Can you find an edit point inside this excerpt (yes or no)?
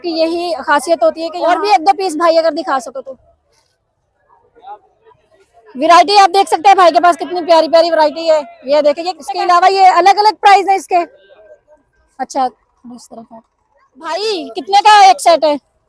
yes